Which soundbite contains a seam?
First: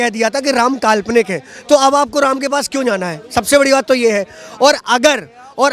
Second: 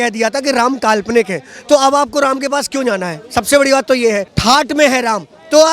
second; 1 cut; at 4.3 s

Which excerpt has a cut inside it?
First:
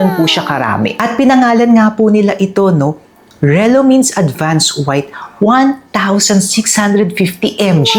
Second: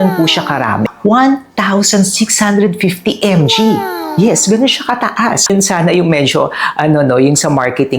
second; 2 cuts; at 0.9 s, 5.5 s

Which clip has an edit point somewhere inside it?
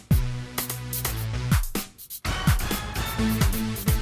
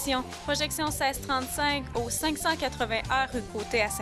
first; 1 cut; at 2.0 s

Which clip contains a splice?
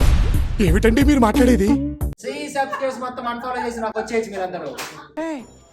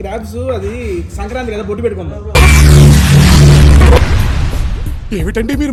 first; 1 cut; at 2.1 s

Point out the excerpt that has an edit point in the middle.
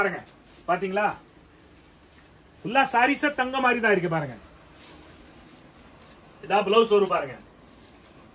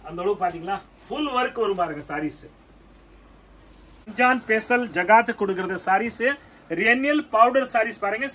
second; 1 cut; at 4.1 s

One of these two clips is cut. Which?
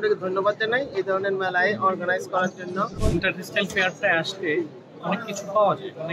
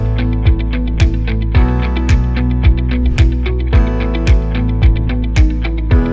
first; 1 cut; at 2.9 s

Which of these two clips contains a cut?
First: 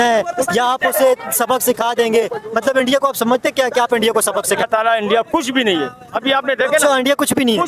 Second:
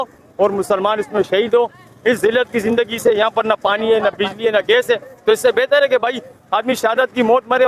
first; 1 cut; at 4.7 s

